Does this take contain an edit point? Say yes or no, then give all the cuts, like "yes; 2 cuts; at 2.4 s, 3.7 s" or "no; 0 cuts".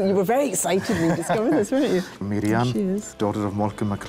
yes; 2 cuts; at 2.1 s, 3.1 s